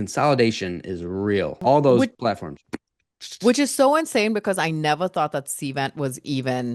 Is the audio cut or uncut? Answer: uncut